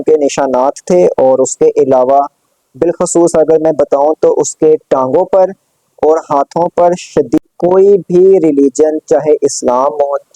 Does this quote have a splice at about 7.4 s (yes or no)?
yes